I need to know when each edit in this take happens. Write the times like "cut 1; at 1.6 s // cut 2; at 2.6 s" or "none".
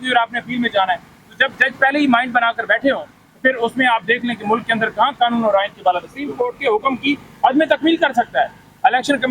cut 1; at 6.2 s